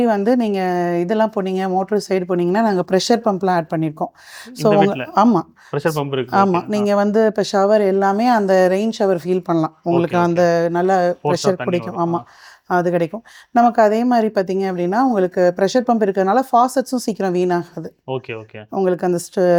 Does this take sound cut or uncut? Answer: uncut